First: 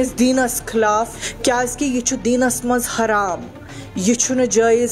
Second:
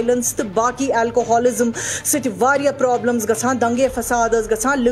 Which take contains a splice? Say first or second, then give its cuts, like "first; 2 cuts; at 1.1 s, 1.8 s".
first; 1 cut; at 1.2 s